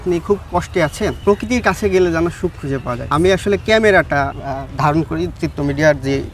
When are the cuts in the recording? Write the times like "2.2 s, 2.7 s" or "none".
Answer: 1.2 s, 3.1 s, 4.4 s